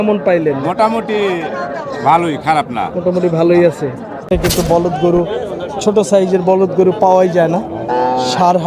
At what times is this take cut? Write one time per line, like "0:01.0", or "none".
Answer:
0:04.3